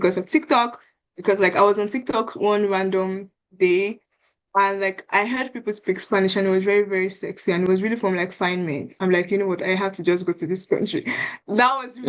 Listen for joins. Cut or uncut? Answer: uncut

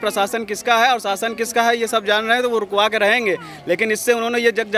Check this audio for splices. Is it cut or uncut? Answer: uncut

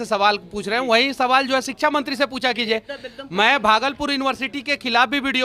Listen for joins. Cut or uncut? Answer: uncut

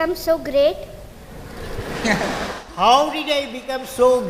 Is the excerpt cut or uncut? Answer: uncut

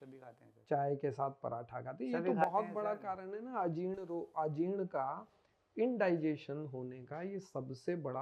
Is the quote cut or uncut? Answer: uncut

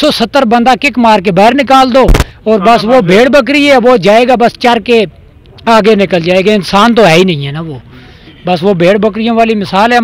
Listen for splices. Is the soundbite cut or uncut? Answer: uncut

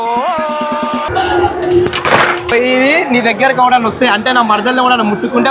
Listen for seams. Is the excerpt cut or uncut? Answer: cut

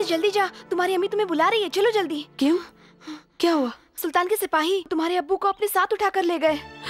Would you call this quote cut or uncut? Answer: cut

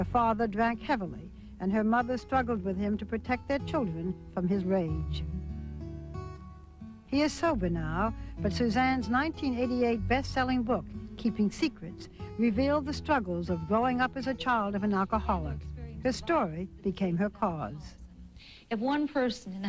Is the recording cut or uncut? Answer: cut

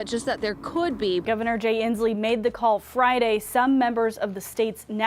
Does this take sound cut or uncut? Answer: cut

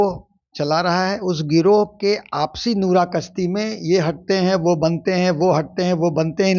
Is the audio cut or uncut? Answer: uncut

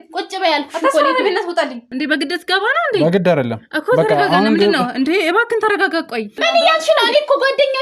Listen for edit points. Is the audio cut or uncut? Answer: cut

